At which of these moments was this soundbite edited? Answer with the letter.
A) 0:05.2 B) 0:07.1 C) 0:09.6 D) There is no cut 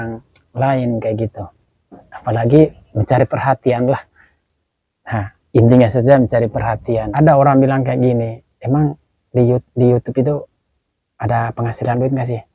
B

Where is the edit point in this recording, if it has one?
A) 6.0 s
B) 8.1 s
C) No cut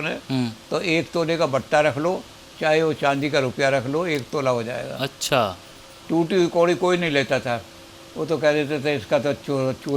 A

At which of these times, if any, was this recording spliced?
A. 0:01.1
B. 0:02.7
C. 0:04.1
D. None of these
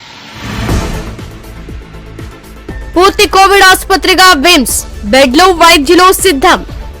B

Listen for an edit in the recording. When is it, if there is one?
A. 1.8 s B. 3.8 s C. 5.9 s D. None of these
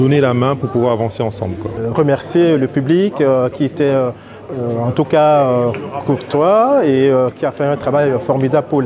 A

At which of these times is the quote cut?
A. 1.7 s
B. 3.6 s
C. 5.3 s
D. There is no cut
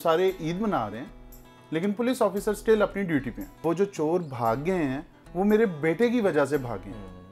B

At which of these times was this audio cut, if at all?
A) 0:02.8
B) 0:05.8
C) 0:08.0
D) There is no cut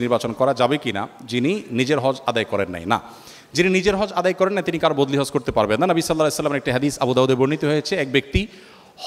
D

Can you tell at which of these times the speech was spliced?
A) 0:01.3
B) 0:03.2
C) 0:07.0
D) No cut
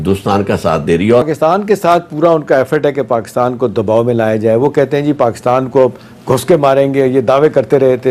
A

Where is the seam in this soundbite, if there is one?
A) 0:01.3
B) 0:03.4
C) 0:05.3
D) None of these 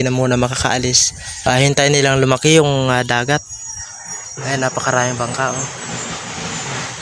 D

